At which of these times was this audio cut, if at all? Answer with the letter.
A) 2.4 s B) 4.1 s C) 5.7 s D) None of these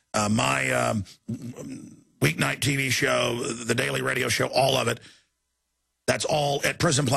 D